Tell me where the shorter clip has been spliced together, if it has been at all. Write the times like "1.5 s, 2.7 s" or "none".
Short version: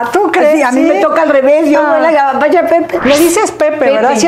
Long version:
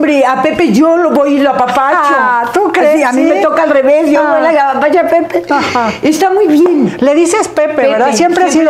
3.0 s